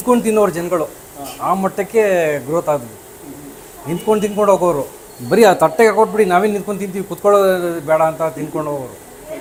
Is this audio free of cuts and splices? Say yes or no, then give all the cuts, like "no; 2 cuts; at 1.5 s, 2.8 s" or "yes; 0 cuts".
yes; 0 cuts